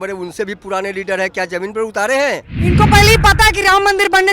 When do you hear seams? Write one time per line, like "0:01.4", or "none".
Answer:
0:02.5